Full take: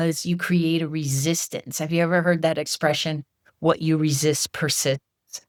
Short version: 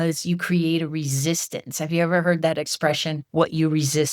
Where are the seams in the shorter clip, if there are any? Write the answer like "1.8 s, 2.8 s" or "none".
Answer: 3.2 s